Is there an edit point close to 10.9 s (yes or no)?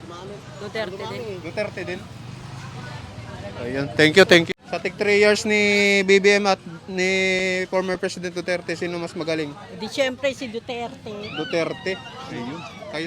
no